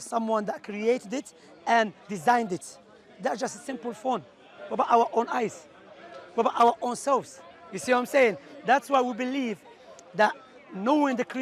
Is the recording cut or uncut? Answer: uncut